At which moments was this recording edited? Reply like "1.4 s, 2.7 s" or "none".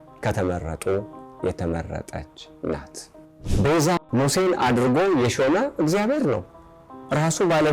3.3 s